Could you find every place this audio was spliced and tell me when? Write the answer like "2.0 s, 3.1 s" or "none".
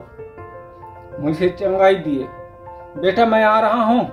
none